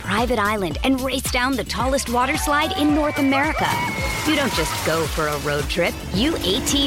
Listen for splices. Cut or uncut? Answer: uncut